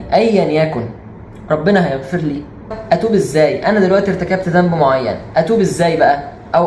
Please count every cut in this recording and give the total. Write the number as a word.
one